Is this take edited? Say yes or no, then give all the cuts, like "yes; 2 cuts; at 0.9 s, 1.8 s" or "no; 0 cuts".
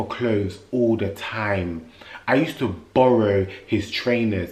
no; 0 cuts